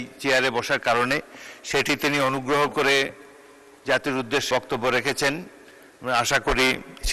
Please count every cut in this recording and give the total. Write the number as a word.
one